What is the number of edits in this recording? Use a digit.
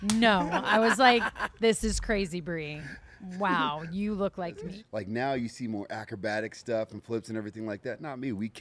1